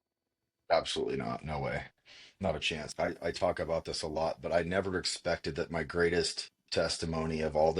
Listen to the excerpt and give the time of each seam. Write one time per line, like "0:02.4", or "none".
0:02.8

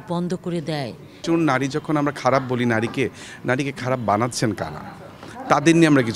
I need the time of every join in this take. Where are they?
0:01.2

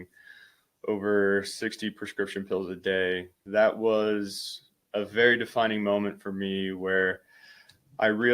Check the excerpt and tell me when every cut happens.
0:03.3

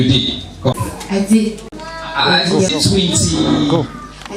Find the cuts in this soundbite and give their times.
0:00.7
0:02.7

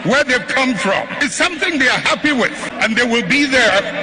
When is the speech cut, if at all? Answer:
0:01.1
0:02.7

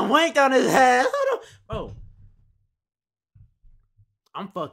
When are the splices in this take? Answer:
none

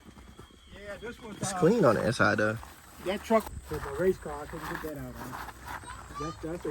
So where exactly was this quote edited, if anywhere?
0:03.4

